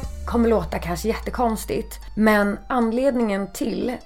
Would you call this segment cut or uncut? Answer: cut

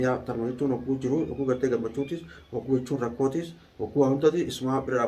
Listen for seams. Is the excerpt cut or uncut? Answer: uncut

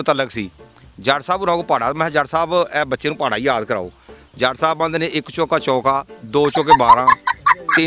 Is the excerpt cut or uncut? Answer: uncut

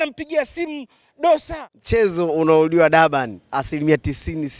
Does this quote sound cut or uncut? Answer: cut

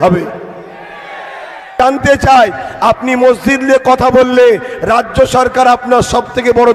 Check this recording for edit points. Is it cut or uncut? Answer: cut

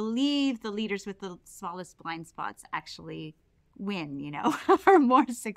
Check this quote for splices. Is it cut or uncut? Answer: uncut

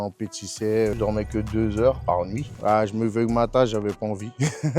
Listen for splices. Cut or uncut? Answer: cut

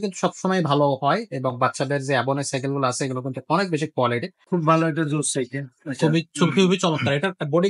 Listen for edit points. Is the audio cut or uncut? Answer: cut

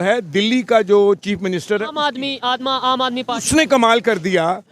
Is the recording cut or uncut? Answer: cut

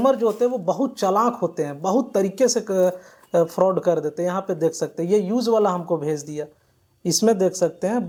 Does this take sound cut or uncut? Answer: uncut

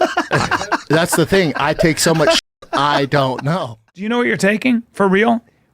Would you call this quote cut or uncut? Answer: cut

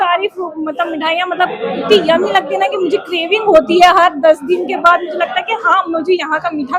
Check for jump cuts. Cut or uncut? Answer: uncut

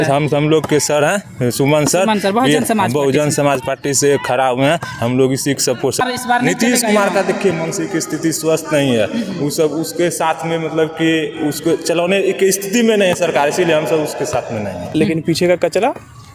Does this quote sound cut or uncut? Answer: cut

